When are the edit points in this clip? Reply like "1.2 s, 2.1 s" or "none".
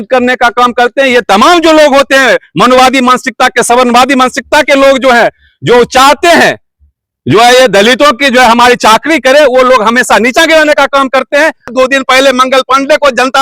11.7 s